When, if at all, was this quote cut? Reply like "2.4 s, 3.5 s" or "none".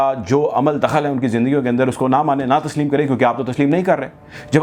none